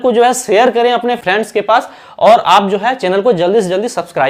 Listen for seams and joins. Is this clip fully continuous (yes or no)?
yes